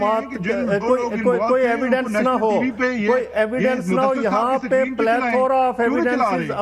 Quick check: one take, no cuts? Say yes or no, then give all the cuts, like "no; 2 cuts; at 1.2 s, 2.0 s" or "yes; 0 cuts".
yes; 0 cuts